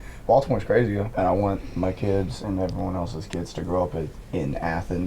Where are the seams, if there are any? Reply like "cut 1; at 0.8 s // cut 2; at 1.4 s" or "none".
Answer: cut 1; at 1.1 s

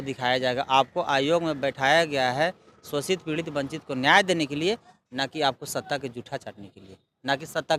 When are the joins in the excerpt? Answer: none

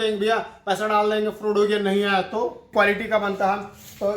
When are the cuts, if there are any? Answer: cut 1; at 2.7 s

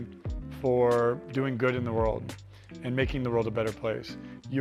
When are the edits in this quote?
none

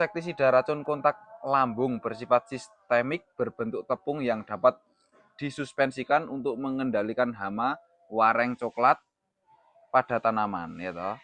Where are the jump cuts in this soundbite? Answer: none

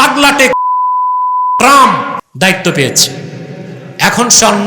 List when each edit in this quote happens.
cut 1; at 2.2 s

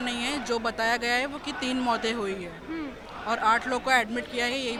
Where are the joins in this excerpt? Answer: none

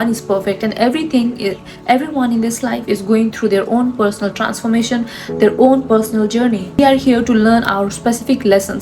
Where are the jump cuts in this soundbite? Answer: cut 1; at 6.8 s

